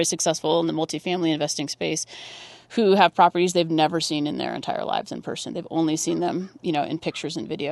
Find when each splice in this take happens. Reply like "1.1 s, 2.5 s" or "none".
none